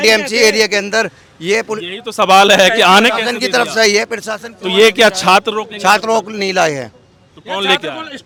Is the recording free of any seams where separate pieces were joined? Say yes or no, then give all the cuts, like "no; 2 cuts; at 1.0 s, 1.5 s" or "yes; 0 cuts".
yes; 0 cuts